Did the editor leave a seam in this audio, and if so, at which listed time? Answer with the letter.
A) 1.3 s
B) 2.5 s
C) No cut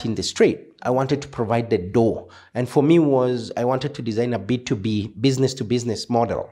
C